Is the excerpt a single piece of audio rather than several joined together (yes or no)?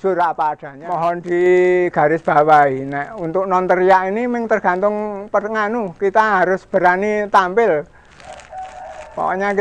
no